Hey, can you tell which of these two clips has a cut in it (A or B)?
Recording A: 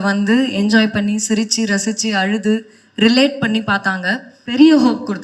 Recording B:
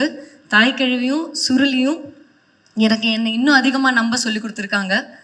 A